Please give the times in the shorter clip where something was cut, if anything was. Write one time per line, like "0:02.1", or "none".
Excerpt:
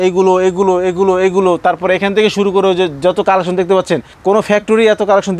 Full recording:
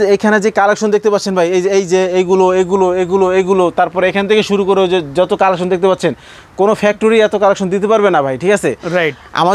0:04.1